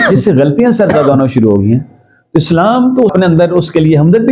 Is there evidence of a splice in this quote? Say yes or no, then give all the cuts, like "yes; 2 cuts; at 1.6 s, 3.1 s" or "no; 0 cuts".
yes; 1 cut; at 3.1 s